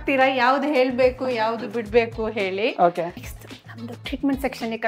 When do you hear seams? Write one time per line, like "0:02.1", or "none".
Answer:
0:03.2